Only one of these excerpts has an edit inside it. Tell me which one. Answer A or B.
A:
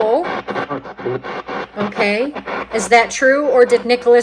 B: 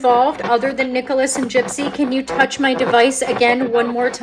A